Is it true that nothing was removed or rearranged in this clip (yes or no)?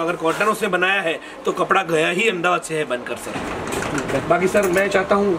yes